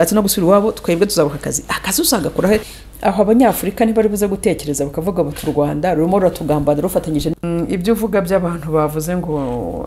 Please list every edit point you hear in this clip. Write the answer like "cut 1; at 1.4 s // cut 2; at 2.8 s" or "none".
cut 1; at 2.7 s // cut 2; at 7.3 s